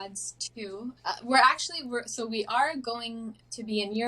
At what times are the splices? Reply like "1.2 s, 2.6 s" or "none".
1.0 s